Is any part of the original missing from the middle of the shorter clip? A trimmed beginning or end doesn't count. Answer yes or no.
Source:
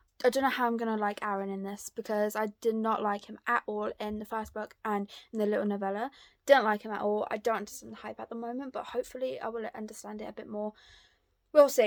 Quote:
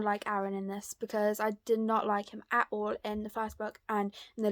no